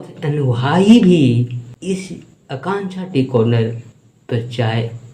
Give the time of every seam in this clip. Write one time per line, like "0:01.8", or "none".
0:01.7